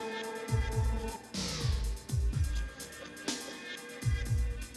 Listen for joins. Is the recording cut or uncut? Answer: cut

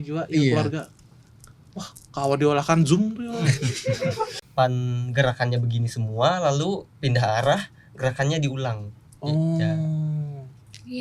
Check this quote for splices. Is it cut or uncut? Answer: cut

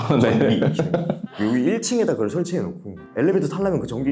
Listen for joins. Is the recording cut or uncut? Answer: cut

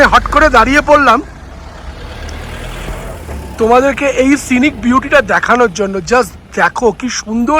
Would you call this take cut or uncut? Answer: uncut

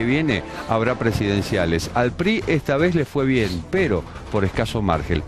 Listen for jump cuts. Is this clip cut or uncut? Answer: cut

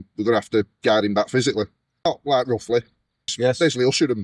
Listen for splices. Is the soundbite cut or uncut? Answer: uncut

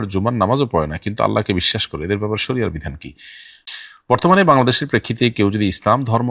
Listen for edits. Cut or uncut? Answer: cut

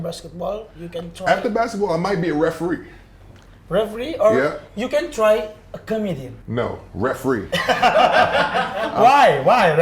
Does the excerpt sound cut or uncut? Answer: cut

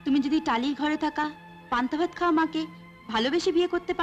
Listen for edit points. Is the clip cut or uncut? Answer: uncut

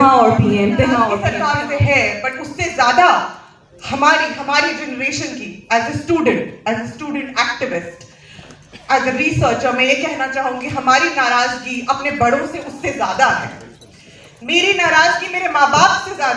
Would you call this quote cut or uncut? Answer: cut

